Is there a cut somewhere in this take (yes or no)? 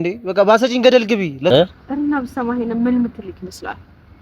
yes